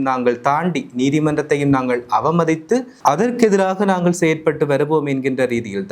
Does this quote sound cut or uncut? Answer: cut